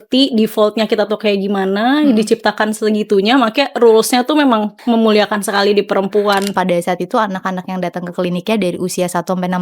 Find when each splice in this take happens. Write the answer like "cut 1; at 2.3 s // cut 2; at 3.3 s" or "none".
cut 1; at 4.7 s // cut 2; at 6.5 s